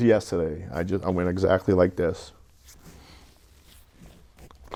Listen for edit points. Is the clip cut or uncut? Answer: uncut